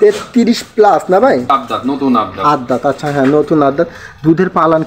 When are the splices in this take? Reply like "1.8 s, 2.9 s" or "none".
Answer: 1.5 s